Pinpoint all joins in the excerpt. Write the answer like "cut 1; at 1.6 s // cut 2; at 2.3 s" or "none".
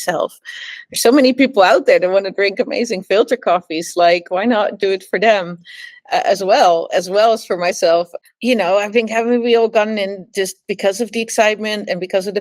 cut 1; at 8.1 s